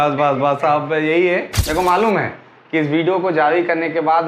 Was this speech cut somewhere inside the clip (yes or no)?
yes